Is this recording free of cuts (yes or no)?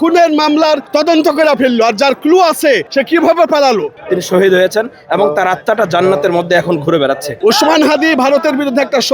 no